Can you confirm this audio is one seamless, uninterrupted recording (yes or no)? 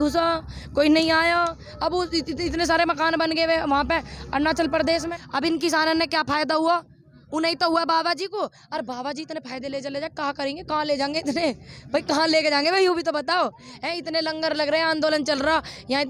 no